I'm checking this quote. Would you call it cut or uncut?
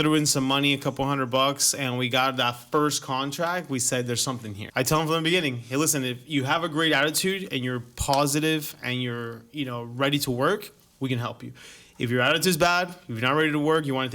cut